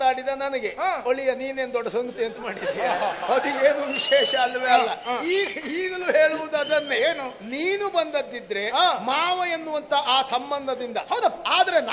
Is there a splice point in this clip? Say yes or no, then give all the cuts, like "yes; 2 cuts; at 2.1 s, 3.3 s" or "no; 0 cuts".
no; 0 cuts